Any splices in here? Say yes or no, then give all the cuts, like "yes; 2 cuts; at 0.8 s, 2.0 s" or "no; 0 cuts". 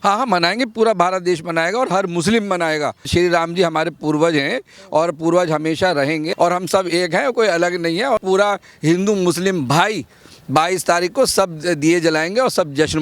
yes; 3 cuts; at 3.0 s, 6.3 s, 8.2 s